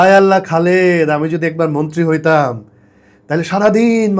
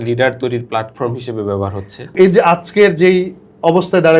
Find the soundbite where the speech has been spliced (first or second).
second